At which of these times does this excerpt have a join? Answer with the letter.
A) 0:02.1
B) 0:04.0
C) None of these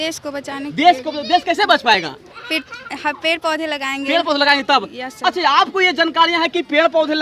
C